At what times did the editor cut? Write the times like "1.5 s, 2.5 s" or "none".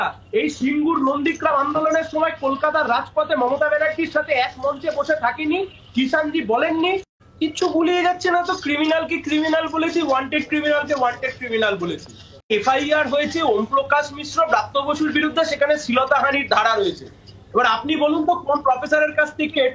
7.2 s, 12.5 s